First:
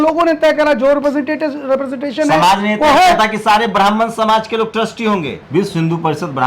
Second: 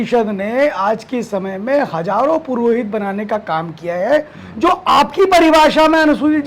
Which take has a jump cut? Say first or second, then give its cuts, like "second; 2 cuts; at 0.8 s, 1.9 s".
first; 1 cut; at 5.4 s